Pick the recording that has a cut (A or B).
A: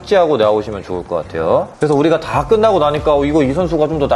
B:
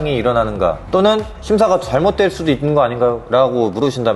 A